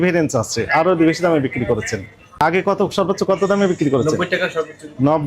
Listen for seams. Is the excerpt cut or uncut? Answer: cut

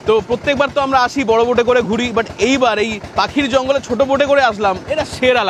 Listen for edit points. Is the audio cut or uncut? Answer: uncut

